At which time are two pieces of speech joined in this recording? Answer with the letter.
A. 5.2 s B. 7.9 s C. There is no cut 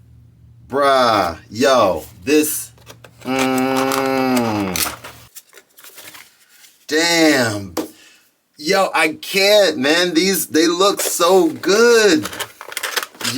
A